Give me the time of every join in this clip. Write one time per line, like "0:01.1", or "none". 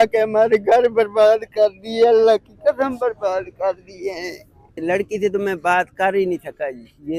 0:04.8